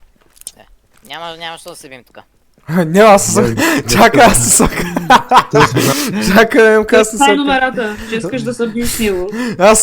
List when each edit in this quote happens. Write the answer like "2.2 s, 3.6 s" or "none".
5.9 s

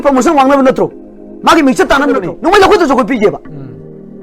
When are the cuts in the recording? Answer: 2.3 s

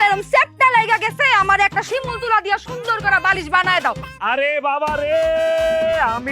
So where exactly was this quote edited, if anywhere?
4.1 s

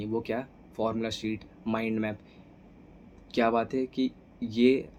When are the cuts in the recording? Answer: none

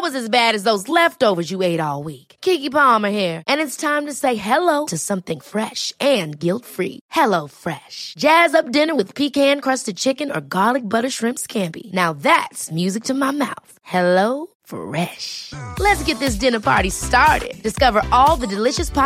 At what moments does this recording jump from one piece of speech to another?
none

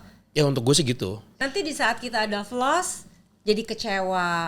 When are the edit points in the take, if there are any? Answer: 1.3 s

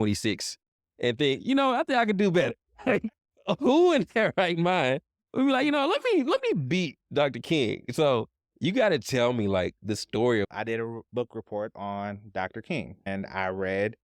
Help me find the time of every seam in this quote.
10.5 s, 13.1 s

